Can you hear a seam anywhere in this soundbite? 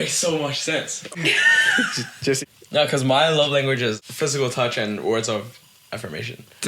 yes; 3 cuts; at 1.1 s, 2.4 s, 4.1 s

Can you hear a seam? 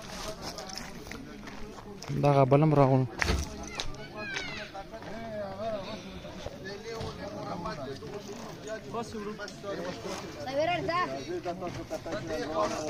no; 0 cuts

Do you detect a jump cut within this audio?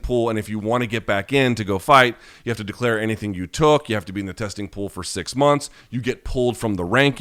no; 0 cuts

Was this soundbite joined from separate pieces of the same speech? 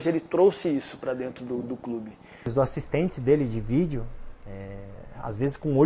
yes; 1 cut; at 2.5 s

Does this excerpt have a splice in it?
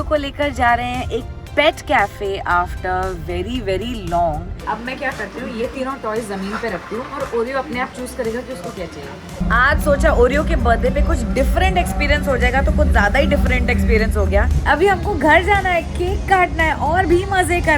yes; 3 cuts; at 4.6 s, 9.4 s, 14.5 s

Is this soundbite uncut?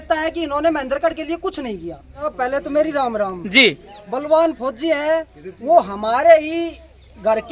no; 1 cut; at 2.2 s

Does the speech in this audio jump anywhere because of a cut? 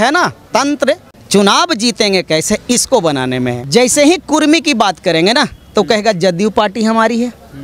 yes; 2 cuts; at 1.1 s, 3.6 s

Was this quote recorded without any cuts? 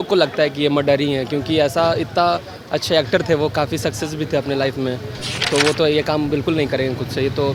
yes; 0 cuts

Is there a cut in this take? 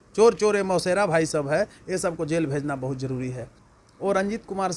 yes; 1 cut; at 3.5 s

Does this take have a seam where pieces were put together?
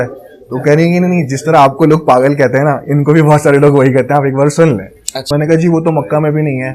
yes; 1 cut; at 5.2 s

